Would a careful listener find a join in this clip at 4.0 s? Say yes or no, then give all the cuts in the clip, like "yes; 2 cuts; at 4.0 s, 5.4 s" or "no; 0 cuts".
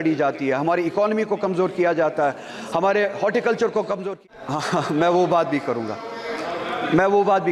yes; 1 cut; at 4.0 s